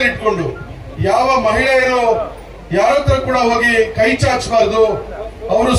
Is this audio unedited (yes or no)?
yes